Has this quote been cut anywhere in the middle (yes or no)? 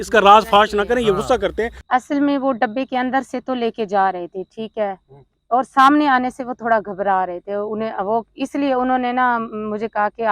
yes